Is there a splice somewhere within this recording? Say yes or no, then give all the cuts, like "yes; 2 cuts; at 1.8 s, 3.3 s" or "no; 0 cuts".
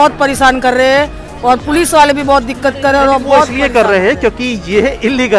no; 0 cuts